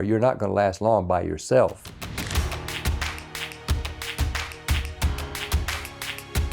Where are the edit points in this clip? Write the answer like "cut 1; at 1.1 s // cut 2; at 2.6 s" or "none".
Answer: cut 1; at 1.9 s